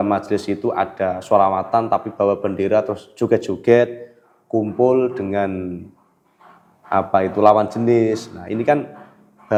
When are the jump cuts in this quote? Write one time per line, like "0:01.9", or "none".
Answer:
none